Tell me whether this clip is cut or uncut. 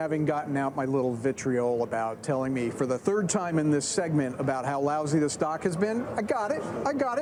uncut